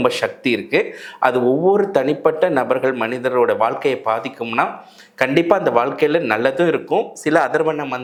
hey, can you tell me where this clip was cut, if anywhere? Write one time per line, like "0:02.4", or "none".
none